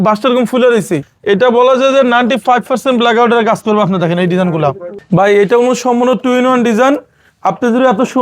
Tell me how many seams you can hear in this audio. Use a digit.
2